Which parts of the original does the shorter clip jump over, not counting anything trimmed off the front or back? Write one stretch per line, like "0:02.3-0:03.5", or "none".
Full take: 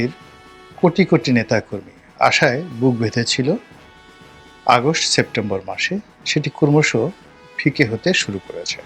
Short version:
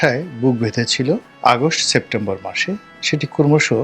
0:03.7-0:04.5